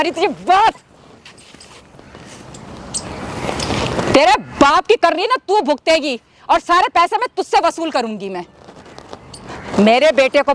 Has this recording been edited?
no; 0 cuts

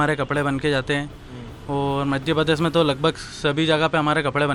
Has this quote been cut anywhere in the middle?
no; 0 cuts

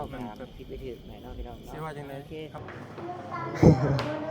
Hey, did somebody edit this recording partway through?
yes; 1 cut; at 2.6 s

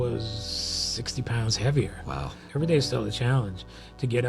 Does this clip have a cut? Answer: yes; 1 cut; at 2.4 s

